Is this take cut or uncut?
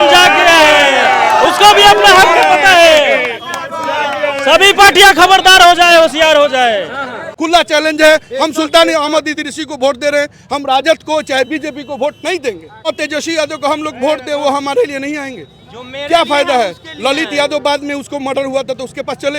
cut